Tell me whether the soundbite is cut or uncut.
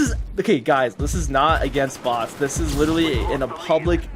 uncut